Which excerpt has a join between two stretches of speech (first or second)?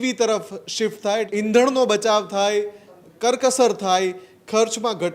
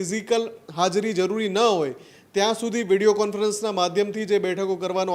first